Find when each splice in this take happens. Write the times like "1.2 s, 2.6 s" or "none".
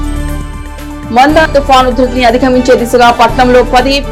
none

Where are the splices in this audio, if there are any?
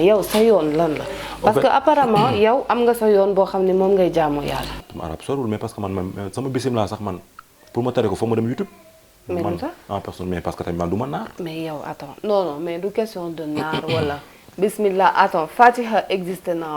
4.9 s

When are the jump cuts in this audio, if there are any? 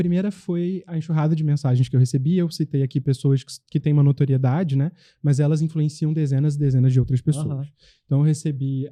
none

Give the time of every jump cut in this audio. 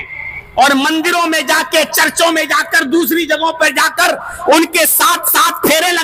none

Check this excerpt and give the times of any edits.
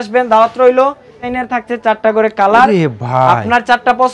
1.3 s

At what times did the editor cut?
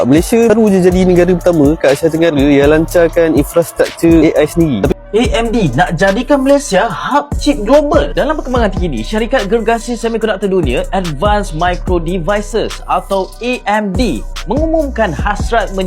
4.9 s

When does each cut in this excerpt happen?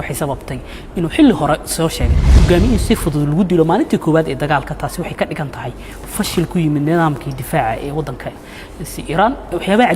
2.4 s

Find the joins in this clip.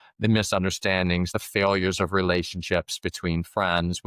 1.3 s

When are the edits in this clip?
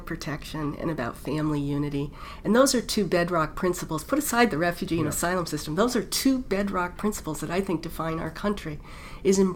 none

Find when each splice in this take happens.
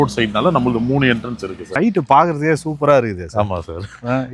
1.6 s

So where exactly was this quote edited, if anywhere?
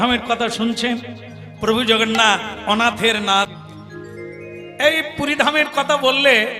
3.5 s

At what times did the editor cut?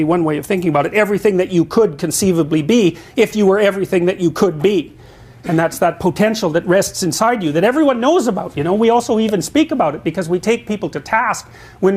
6.6 s

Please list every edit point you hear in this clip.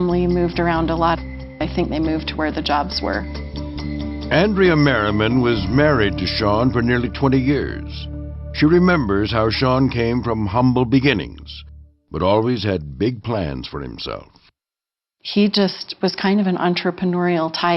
none

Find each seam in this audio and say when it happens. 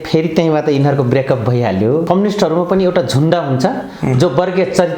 2.1 s

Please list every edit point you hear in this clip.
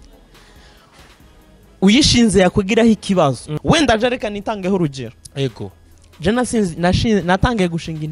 3.5 s

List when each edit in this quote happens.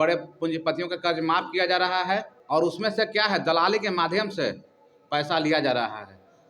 none

